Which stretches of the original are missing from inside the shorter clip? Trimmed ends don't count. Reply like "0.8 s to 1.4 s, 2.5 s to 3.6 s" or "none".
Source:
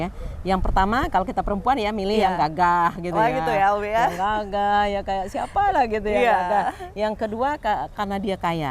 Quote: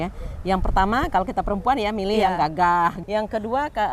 3.0 s to 6.9 s

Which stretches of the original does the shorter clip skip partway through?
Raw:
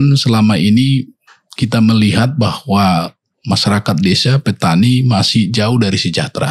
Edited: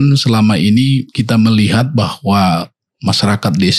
1.1 s to 1.5 s

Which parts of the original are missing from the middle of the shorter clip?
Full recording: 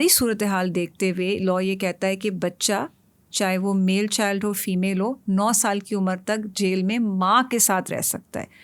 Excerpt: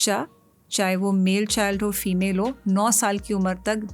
none

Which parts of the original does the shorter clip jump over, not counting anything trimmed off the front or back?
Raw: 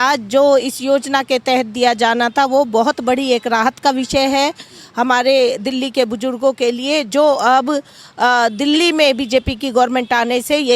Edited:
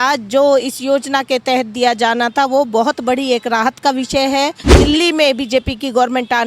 4.8 s to 8.6 s

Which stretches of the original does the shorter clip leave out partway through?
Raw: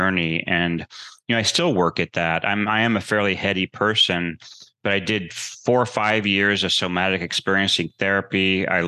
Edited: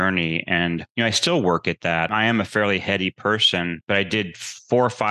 0.9 s to 1.2 s, 2.4 s to 2.7 s, 4.3 s to 4.7 s

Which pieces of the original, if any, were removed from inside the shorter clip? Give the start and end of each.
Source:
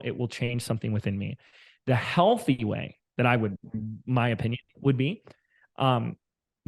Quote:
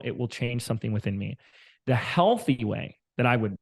none

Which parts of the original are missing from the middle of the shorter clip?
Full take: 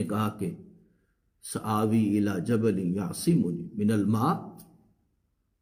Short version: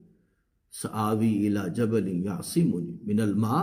none

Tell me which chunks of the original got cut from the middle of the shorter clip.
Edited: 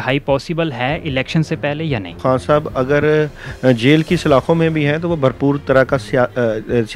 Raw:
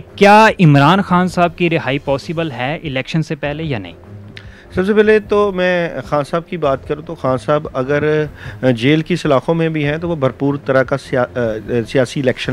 3.9 s to 7.1 s

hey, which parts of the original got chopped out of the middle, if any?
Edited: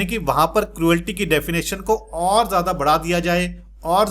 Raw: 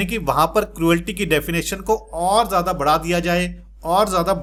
none

